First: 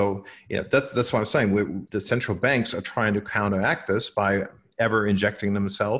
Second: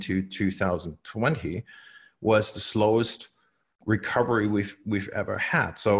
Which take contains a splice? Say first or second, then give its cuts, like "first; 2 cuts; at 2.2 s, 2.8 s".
first; 2 cuts; at 1.9 s, 4.6 s